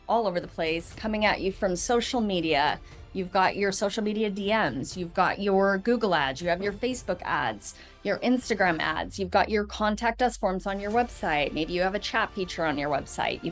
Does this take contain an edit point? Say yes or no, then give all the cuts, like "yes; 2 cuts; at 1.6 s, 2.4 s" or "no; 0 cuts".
no; 0 cuts